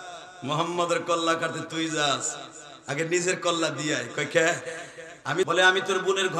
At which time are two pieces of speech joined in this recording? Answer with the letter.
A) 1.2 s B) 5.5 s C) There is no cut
B